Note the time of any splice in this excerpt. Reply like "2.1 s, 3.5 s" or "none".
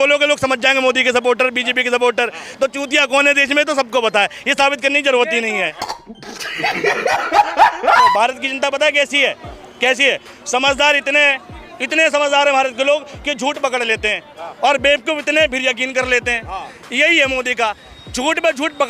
8.1 s